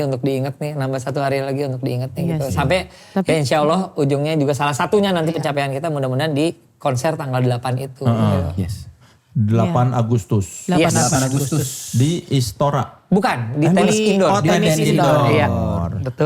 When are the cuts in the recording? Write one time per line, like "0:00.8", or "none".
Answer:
none